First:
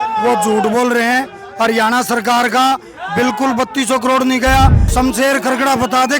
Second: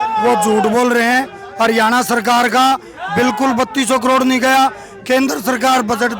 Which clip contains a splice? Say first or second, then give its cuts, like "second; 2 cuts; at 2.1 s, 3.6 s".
first; 1 cut; at 4.8 s